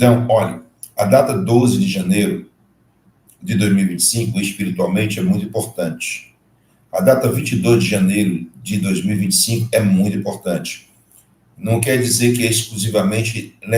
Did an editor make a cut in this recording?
no; 0 cuts

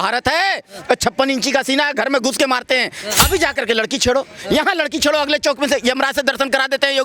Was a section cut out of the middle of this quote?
yes; 1 cut; at 3.0 s

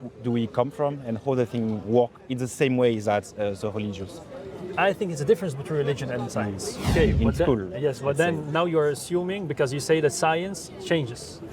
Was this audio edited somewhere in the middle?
yes; 1 cut; at 6.9 s

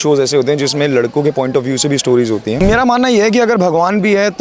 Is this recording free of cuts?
no; 1 cut; at 2.6 s

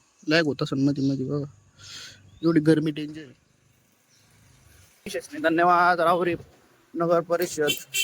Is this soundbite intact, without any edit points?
no; 1 cut; at 5.2 s

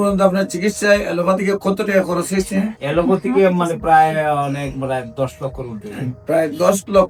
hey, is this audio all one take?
yes; 0 cuts

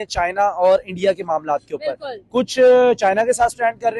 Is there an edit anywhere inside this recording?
no; 0 cuts

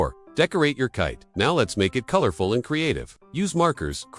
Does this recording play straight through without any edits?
yes; 0 cuts

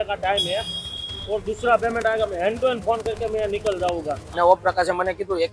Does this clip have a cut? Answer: yes; 1 cut; at 4.2 s

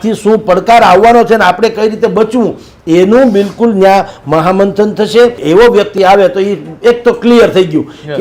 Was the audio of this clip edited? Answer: yes; 1 cut; at 5.4 s

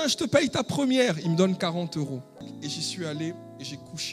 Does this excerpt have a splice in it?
yes; 1 cut; at 2.5 s

